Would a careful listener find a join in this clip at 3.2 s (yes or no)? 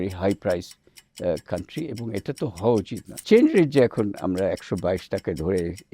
yes